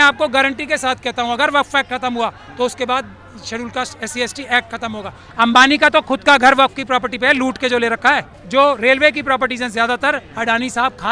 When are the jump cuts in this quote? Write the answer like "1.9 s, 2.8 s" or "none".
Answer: 5.2 s, 8.3 s